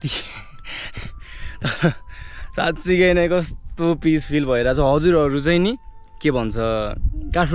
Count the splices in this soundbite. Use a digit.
0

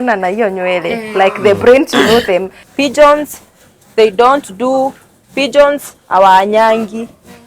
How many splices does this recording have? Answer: 1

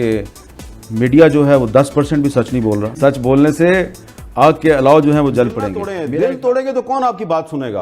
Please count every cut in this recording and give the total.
1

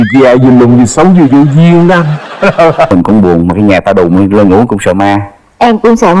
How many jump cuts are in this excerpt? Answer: 1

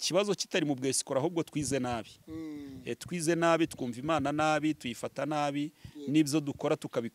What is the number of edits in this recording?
0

